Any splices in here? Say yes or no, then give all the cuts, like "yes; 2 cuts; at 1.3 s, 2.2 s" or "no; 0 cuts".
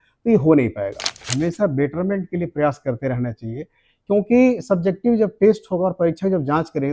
yes; 1 cut; at 1.3 s